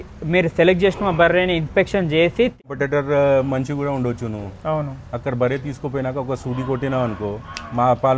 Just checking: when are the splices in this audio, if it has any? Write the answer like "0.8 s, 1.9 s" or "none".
2.6 s